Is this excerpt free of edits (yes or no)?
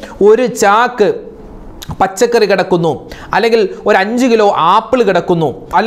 yes